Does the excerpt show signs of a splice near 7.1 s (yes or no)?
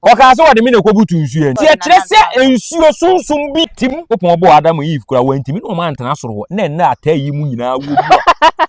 no